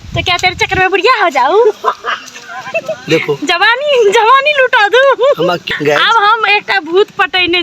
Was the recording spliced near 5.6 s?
yes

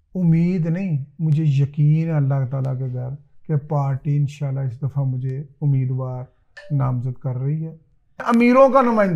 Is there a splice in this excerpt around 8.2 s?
yes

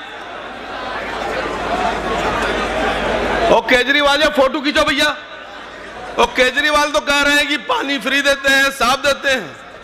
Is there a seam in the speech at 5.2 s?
no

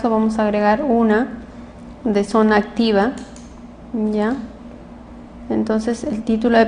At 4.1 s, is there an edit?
yes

